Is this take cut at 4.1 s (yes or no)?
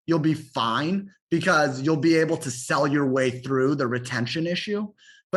no